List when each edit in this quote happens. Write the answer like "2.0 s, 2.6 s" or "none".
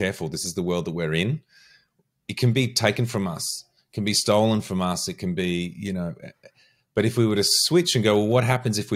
none

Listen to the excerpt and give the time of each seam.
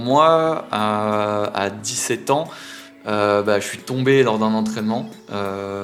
none

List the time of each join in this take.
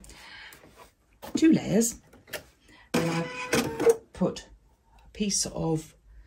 2.9 s

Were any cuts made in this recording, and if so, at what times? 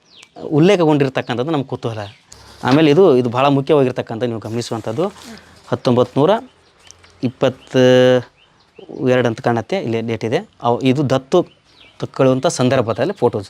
2.5 s

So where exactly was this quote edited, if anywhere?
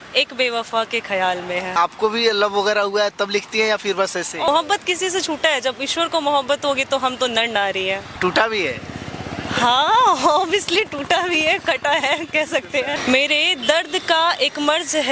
1.7 s, 4.5 s, 8.2 s, 13.0 s

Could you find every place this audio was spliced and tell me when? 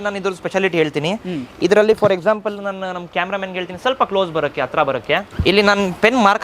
none

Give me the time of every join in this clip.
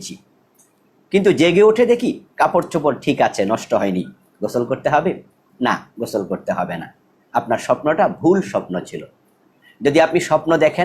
none

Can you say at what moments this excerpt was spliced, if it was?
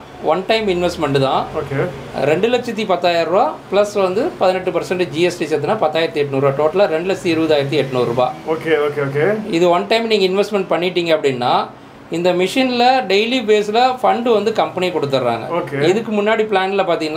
none

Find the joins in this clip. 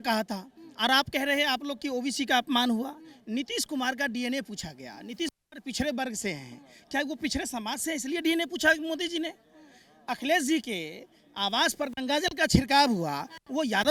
none

